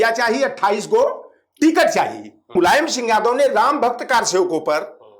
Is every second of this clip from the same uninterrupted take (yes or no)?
no